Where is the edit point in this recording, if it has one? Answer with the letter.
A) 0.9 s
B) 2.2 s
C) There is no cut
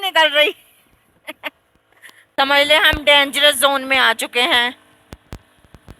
B